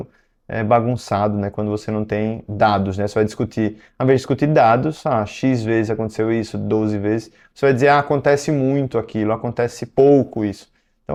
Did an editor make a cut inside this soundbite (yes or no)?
no